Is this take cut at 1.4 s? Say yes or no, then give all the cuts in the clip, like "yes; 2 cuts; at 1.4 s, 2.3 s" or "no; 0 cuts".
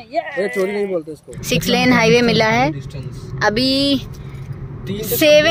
yes; 1 cut; at 1.4 s